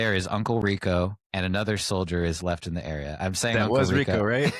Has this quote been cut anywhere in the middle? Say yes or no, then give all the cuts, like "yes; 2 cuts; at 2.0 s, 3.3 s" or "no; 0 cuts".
yes; 1 cut; at 1.2 s